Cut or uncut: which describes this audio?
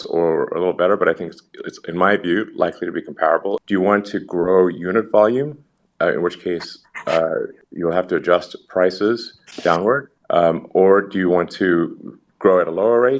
cut